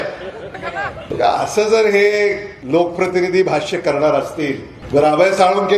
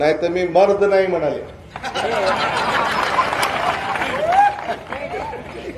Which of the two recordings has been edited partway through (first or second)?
first